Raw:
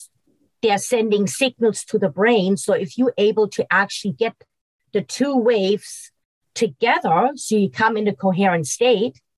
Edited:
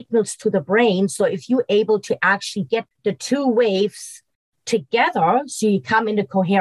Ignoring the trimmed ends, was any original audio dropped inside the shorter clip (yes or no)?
yes